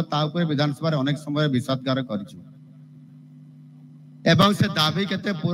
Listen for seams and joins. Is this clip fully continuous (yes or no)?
yes